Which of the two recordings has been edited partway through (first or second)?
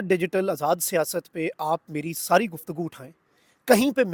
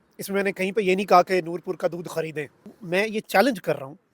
second